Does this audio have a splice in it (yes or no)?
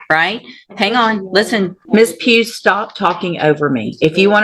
yes